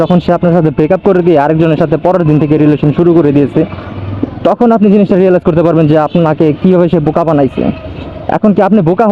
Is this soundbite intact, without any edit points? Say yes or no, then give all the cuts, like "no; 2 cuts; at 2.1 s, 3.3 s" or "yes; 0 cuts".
yes; 0 cuts